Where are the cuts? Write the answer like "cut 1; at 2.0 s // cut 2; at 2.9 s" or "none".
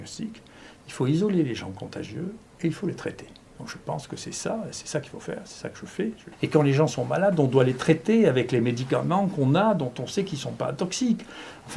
cut 1; at 6.2 s